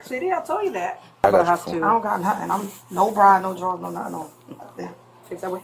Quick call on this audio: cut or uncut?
cut